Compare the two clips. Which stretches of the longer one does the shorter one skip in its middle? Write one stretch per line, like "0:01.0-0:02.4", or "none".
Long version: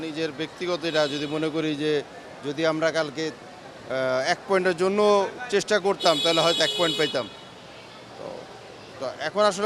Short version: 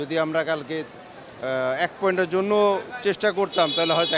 none